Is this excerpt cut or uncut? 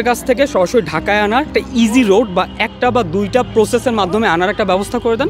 uncut